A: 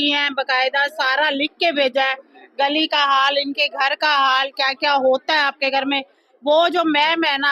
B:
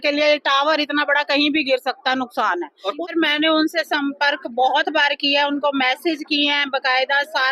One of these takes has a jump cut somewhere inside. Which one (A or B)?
B